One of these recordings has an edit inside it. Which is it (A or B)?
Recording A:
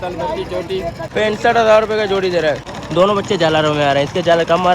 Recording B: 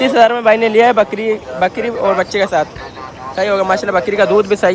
A